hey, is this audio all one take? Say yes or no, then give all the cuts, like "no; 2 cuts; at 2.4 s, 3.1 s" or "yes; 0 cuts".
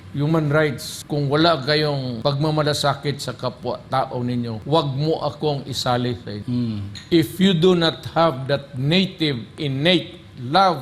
no; 4 cuts; at 0.9 s, 2.2 s, 4.6 s, 6.3 s